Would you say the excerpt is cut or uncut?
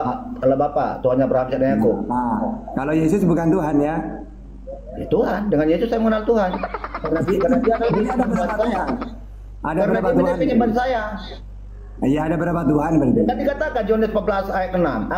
uncut